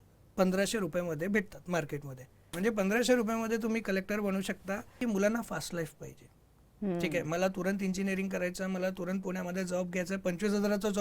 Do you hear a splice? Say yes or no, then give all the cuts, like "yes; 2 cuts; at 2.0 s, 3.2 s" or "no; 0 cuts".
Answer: yes; 2 cuts; at 2.4 s, 5.0 s